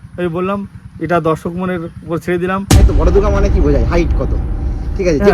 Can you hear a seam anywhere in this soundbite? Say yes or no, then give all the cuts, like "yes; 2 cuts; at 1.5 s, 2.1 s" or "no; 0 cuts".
yes; 1 cut; at 2.8 s